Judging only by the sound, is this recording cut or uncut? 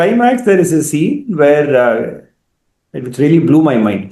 uncut